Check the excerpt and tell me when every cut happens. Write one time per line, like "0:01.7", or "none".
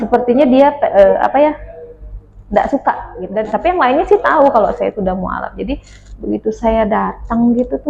0:03.2